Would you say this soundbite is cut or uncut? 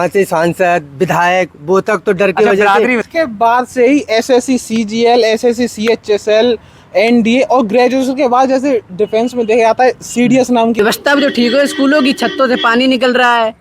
cut